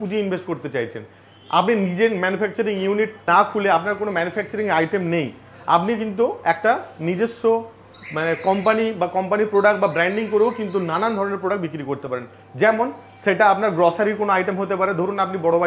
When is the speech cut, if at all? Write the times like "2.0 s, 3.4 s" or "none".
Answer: none